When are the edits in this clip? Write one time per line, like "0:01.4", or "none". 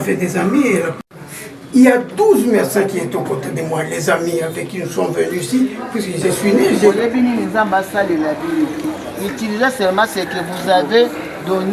0:07.0